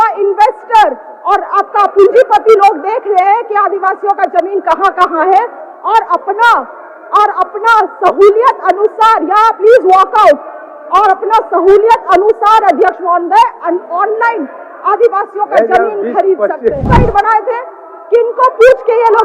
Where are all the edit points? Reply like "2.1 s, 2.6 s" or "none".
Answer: 16.8 s